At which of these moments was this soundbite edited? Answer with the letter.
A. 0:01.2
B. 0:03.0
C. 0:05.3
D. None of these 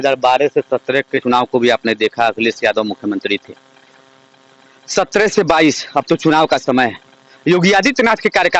A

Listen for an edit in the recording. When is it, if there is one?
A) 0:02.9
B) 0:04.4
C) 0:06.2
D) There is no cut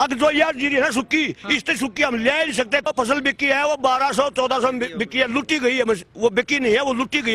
A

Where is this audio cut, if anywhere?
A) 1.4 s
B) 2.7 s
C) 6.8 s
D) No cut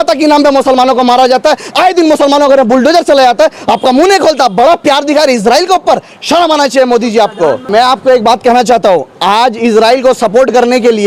D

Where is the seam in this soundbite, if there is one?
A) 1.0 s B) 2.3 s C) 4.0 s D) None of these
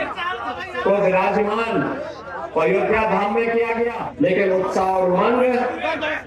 C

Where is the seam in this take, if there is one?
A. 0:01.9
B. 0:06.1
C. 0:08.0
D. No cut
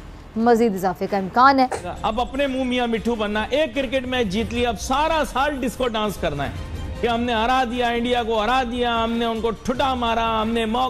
A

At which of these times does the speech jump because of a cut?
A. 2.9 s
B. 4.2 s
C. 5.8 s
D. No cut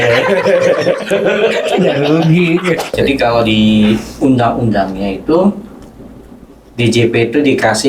A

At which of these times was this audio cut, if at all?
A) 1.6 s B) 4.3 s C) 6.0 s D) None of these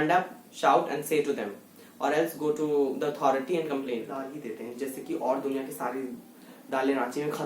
B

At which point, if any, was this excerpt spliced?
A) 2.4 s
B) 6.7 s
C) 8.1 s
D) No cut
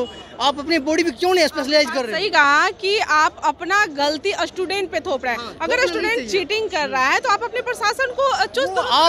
D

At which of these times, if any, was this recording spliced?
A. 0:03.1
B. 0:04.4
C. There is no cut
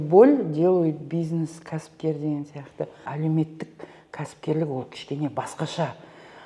A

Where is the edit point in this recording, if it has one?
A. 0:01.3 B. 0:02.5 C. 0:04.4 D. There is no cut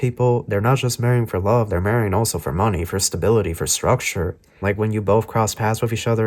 C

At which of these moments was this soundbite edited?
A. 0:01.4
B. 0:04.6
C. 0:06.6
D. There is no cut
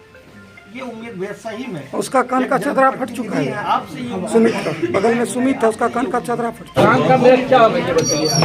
C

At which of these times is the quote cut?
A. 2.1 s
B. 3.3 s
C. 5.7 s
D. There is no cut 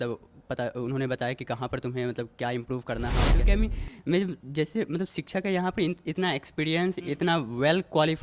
B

